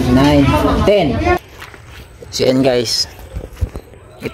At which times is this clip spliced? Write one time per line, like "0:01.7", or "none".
0:01.4